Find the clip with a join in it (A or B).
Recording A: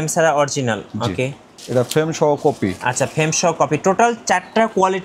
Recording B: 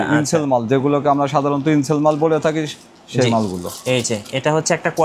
A